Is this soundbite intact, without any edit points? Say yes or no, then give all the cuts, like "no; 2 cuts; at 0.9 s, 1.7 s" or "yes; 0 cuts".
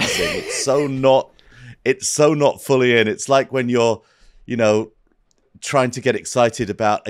yes; 0 cuts